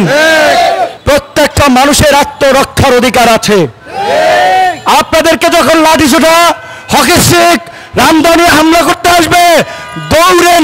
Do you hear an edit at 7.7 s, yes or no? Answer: no